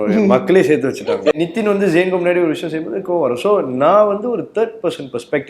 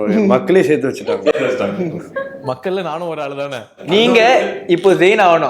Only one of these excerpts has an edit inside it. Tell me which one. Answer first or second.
first